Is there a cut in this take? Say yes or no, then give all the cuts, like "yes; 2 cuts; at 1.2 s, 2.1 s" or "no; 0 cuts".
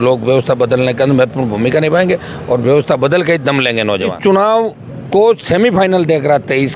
yes; 1 cut; at 4.1 s